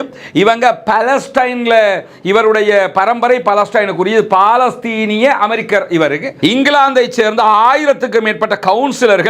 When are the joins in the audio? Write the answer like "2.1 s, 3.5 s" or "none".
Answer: 6.3 s